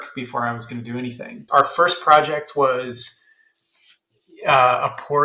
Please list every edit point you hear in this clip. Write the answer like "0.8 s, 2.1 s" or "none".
1.4 s